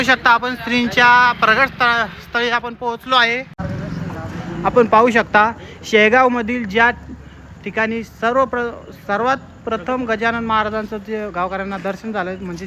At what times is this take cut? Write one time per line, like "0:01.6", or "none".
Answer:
0:03.6